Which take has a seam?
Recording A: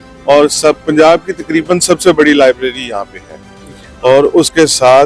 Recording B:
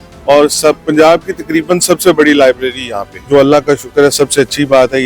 B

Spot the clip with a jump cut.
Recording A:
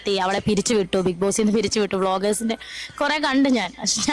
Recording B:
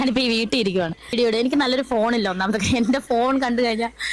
B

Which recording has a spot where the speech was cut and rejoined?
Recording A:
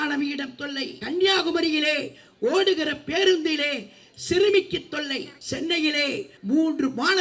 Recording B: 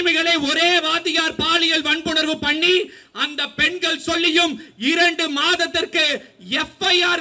A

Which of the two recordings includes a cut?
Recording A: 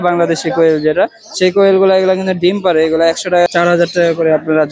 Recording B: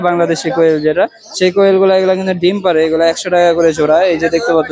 A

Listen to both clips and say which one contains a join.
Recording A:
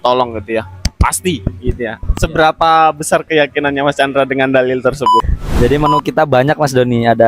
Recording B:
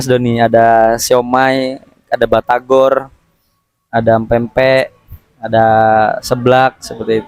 A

